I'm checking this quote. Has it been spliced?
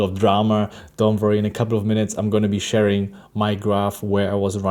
no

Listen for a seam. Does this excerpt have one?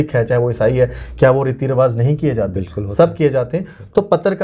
no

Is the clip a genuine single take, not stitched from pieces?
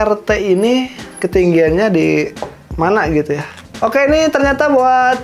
yes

